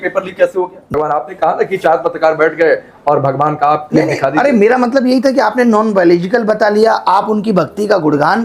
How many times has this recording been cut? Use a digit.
1